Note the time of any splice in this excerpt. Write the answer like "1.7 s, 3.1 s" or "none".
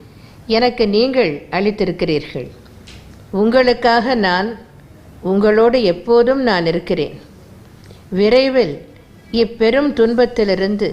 none